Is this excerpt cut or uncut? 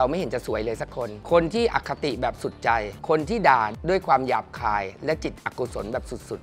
uncut